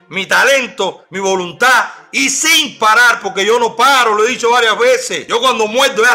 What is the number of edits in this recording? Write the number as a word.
one